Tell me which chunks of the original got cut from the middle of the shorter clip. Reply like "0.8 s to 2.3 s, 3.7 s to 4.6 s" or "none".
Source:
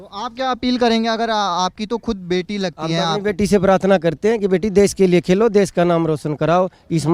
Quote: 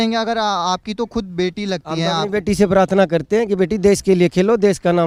none